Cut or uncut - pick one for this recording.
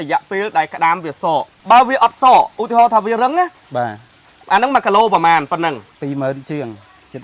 cut